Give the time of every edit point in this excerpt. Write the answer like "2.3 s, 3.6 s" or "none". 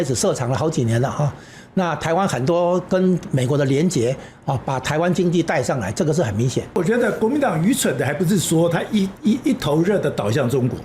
6.8 s